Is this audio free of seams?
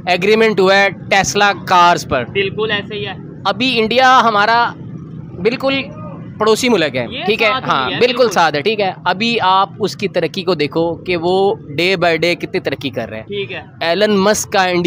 yes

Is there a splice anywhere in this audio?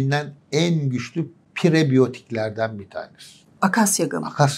no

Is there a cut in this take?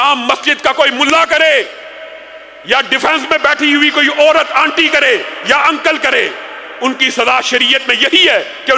no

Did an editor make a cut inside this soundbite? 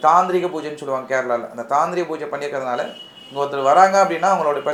no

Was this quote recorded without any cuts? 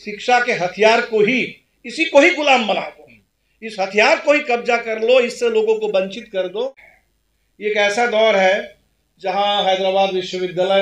no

